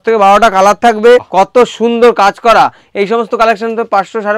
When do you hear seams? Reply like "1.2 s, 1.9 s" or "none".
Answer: 1.3 s